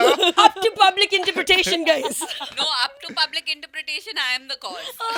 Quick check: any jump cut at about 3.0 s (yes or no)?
no